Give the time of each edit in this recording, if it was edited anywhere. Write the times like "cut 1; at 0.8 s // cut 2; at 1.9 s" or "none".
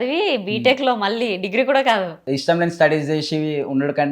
cut 1; at 2.2 s